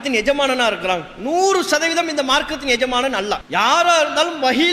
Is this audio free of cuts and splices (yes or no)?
no